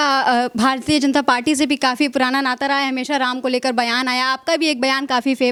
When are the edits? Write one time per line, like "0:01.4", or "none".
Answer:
none